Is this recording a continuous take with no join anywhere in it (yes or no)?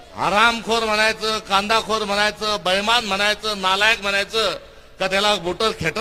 yes